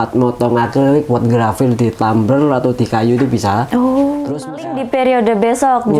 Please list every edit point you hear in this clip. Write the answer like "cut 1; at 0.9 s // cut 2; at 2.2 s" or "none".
cut 1; at 4.5 s